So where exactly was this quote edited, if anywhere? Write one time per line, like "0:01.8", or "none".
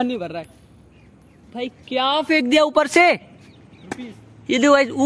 none